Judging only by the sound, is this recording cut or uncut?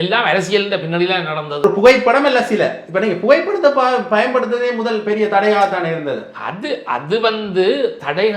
cut